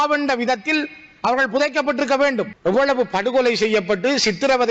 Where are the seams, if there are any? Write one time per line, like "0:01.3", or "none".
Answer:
0:02.5